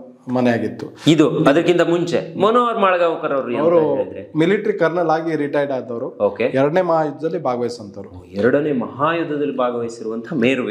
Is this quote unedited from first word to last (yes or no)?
yes